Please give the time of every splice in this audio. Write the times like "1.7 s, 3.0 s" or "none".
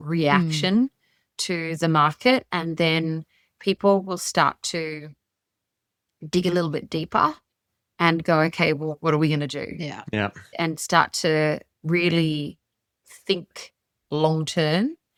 none